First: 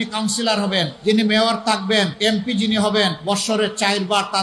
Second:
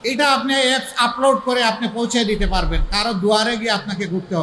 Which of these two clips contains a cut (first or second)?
first